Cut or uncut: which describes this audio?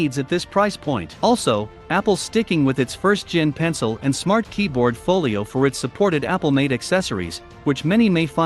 cut